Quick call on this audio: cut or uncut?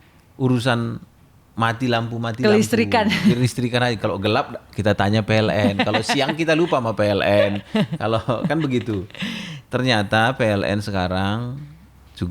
uncut